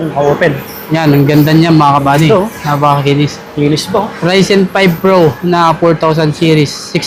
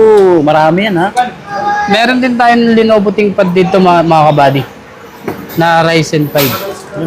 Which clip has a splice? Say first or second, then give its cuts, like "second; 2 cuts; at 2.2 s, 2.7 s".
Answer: second; 1 cut; at 1.5 s